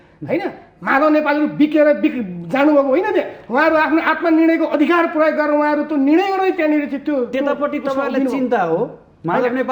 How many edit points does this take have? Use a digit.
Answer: 0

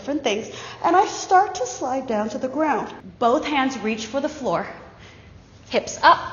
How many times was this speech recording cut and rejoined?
1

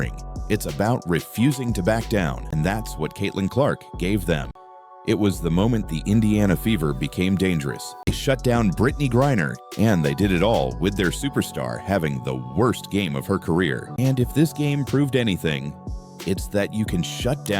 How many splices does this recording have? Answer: 4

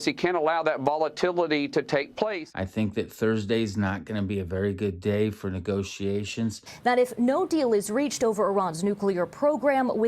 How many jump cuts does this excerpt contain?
2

